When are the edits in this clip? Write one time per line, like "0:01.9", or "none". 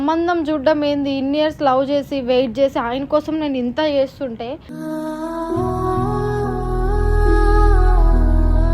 none